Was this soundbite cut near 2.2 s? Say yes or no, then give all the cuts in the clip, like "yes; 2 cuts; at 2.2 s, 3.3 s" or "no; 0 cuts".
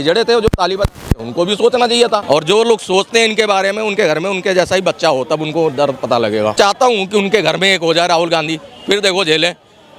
yes; 1 cut; at 2.2 s